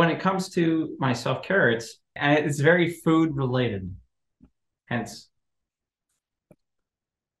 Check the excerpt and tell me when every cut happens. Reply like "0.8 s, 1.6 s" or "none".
2.1 s